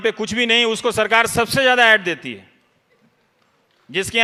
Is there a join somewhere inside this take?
no; 0 cuts

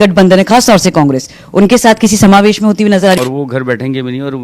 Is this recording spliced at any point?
yes; 1 cut; at 3.2 s

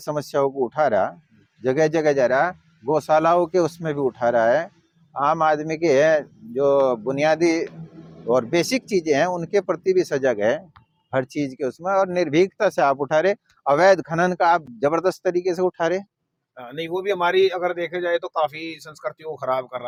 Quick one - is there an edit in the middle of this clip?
no; 0 cuts

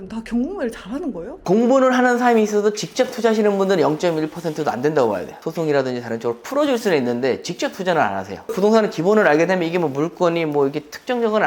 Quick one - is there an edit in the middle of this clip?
yes; 3 cuts; at 1.4 s, 5.5 s, 8.4 s

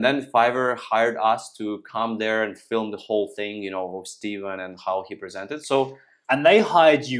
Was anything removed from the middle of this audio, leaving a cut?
no; 0 cuts

